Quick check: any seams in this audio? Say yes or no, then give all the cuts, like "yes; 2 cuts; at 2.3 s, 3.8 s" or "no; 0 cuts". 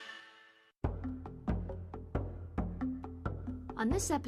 no; 0 cuts